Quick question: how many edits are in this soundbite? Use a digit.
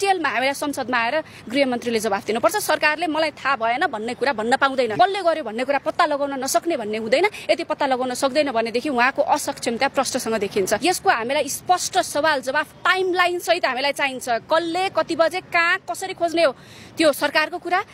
2